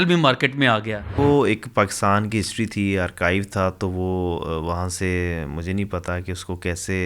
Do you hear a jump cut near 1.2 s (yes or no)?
yes